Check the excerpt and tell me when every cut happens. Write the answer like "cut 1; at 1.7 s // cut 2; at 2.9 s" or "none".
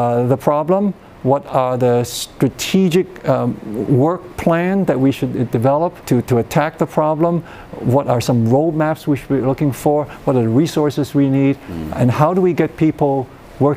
cut 1; at 6.0 s